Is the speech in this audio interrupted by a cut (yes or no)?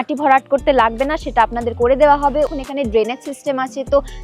yes